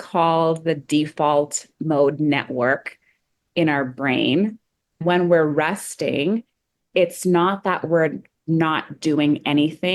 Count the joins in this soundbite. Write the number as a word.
one